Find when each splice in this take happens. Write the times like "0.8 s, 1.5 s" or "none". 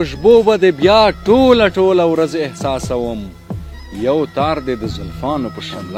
none